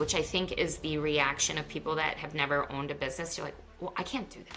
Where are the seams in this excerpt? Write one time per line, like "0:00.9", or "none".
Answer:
none